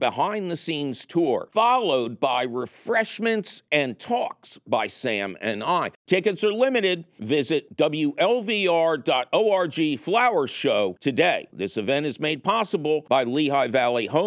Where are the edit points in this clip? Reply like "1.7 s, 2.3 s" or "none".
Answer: none